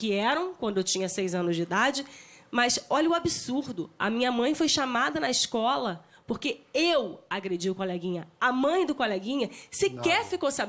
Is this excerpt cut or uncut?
uncut